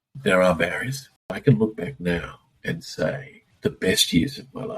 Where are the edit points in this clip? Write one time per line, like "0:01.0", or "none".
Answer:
0:01.3
0:03.4